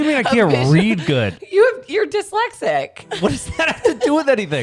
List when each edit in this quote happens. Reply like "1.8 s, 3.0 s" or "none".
3.0 s